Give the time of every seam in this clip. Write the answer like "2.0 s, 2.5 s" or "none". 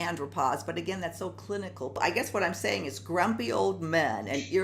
2.0 s